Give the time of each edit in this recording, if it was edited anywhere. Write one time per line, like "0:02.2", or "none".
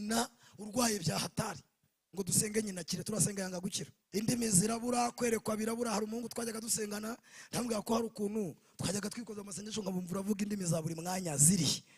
0:03.9